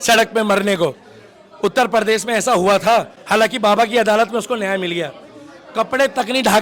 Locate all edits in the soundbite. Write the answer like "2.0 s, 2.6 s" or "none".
none